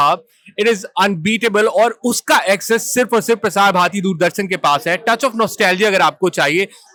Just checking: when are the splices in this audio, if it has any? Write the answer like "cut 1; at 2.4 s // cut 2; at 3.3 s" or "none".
none